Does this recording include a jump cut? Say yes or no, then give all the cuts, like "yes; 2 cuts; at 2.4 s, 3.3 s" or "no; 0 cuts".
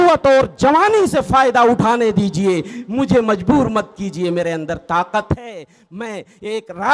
no; 0 cuts